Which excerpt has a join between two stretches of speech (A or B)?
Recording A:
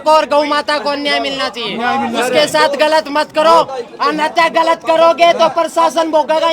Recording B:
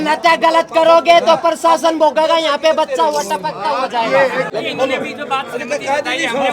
B